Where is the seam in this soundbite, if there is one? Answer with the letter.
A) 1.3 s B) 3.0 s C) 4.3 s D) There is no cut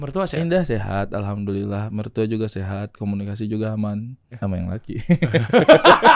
C